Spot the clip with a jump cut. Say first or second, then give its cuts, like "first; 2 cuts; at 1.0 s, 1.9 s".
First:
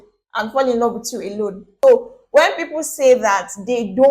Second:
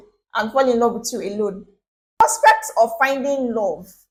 first; 1 cut; at 1.7 s